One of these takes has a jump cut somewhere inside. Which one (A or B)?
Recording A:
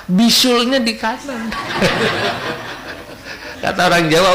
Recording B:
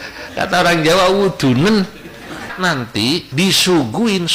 B